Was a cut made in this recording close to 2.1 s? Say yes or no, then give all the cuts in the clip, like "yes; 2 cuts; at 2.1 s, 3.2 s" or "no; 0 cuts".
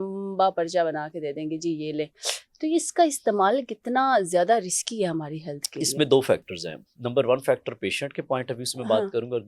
no; 0 cuts